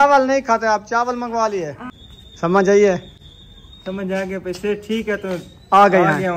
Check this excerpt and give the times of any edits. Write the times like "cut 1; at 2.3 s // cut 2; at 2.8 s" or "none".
cut 1; at 1.9 s